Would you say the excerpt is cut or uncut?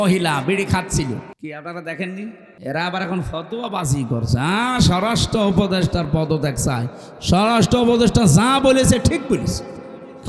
cut